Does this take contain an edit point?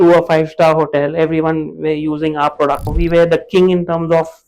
yes; 1 cut; at 2.9 s

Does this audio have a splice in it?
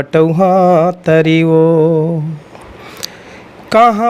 no; 0 cuts

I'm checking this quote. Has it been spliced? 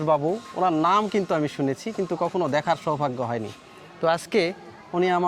no; 0 cuts

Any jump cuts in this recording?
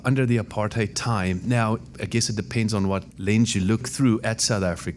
yes; 4 cuts; at 1.0 s, 1.9 s, 3.1 s, 3.9 s

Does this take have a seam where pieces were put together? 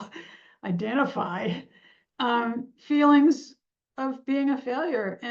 no; 0 cuts

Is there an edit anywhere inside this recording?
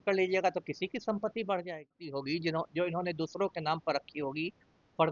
yes; 1 cut; at 2.1 s

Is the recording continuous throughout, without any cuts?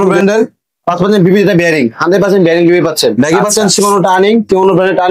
no; 1 cut; at 3.1 s

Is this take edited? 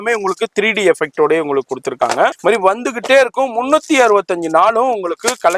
yes; 1 cut; at 2.4 s

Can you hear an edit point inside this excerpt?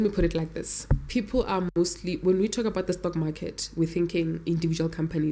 no; 0 cuts

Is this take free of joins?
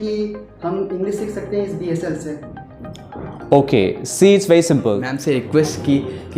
no; 1 cut; at 5.1 s

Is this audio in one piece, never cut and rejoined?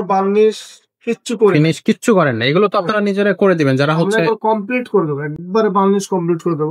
yes; 0 cuts

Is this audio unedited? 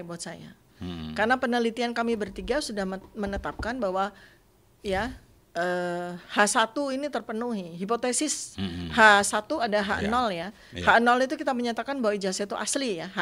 yes; 0 cuts

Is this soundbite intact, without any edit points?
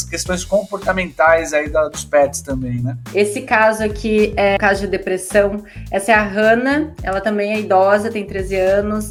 yes; 0 cuts

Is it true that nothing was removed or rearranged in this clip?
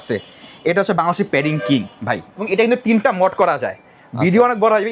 no; 1 cut; at 2.3 s

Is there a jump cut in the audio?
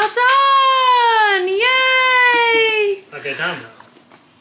no; 0 cuts

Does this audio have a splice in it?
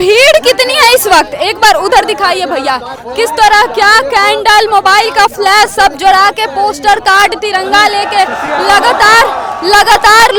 no; 0 cuts

